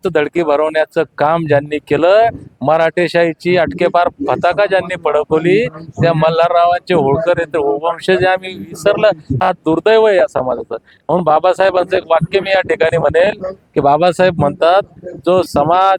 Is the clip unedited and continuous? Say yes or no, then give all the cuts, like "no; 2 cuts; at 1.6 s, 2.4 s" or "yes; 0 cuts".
yes; 0 cuts